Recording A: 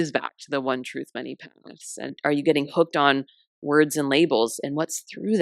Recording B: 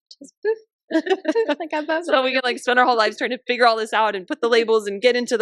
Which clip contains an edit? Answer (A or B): A